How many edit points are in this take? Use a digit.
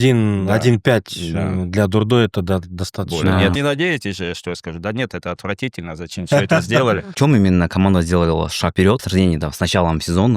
3